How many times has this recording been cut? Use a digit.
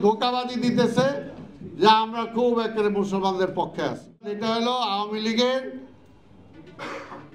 1